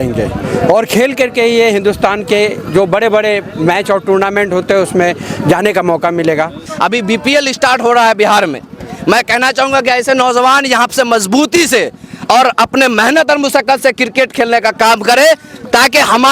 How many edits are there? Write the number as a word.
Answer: one